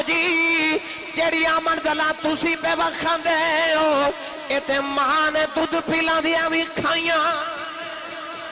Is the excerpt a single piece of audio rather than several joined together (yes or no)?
yes